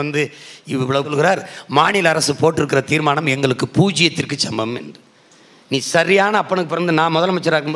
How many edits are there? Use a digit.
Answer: 1